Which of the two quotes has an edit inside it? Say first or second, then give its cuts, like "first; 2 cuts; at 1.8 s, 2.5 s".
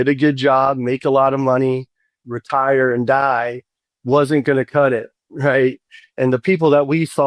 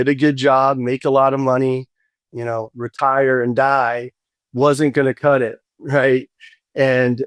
first; 2 cuts; at 2.3 s, 6.1 s